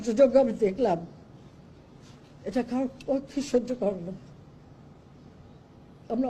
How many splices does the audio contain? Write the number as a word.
zero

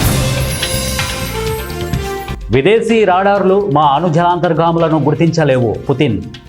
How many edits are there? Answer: one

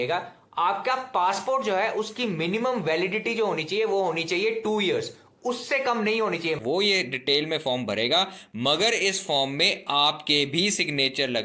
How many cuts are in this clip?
one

